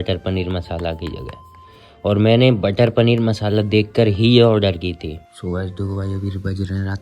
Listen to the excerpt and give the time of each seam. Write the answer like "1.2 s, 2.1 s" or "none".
5.3 s